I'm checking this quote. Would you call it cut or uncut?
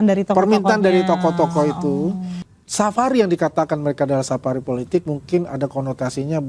cut